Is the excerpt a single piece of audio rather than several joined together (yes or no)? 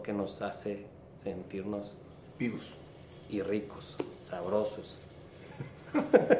yes